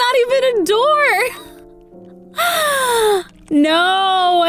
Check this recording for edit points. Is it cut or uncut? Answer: uncut